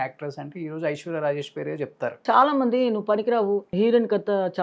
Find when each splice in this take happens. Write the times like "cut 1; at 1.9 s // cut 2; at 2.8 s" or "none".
cut 1; at 2.2 s // cut 2; at 3.7 s